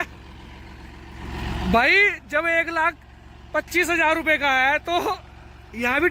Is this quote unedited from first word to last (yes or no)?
yes